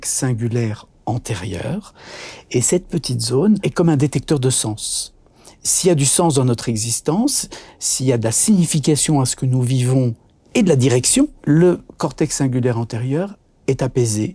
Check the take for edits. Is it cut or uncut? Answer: cut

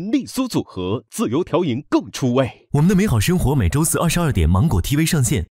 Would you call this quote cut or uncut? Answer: cut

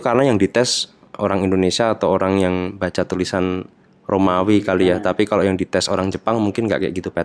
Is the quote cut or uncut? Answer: uncut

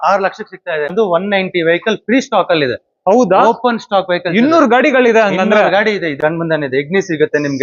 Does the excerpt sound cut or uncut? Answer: cut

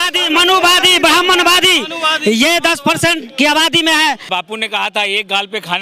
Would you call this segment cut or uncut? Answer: cut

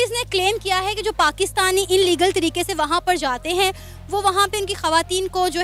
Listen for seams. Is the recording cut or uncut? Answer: uncut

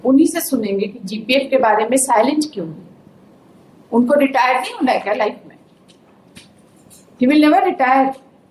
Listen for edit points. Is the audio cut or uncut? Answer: uncut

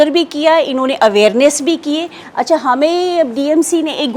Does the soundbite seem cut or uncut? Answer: uncut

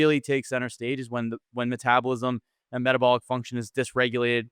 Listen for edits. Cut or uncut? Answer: uncut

